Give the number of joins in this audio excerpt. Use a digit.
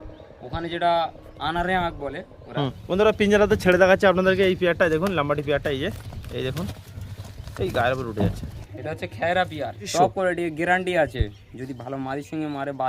3